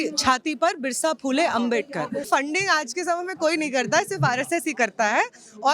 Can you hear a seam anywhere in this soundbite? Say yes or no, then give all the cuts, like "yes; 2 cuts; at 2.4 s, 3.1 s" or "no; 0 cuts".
yes; 1 cut; at 2.3 s